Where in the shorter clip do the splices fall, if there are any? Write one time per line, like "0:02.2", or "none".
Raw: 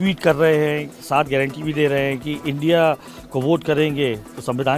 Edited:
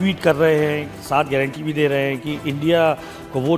none